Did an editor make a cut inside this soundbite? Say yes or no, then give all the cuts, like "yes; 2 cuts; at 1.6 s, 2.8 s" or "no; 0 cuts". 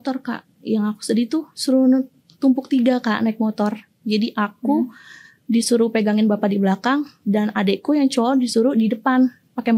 no; 0 cuts